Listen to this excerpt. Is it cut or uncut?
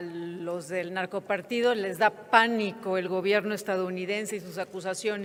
uncut